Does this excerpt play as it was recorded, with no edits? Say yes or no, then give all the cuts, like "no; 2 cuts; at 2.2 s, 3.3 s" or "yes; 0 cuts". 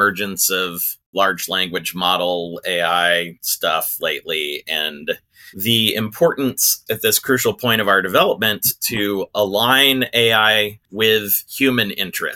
no; 1 cut; at 10.8 s